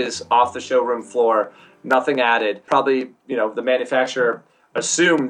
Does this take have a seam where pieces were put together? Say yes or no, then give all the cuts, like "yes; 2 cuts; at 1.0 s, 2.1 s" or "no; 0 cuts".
yes; 1 cut; at 2.6 s